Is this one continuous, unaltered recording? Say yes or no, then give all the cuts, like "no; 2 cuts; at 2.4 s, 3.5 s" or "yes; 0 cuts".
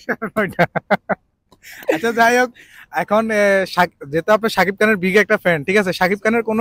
yes; 0 cuts